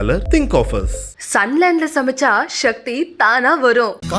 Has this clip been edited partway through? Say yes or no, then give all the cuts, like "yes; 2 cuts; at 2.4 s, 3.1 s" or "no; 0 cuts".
no; 0 cuts